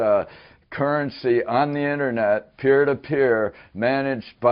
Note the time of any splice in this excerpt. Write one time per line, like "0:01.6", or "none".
none